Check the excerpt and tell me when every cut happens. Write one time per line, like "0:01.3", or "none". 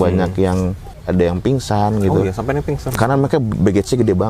0:01.0